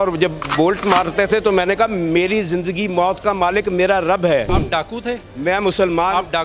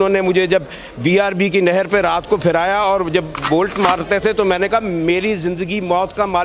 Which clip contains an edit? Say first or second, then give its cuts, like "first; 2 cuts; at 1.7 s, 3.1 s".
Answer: first; 1 cut; at 4.5 s